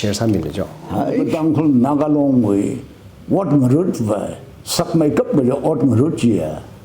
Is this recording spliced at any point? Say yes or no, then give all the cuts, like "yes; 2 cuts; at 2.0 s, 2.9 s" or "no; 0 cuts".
yes; 1 cut; at 1.2 s